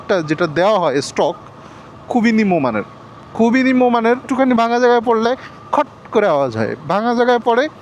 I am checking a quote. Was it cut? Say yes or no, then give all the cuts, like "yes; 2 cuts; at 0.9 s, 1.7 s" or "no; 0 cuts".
yes; 1 cut; at 4.3 s